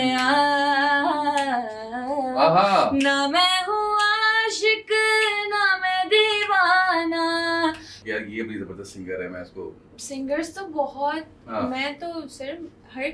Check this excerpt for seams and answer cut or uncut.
cut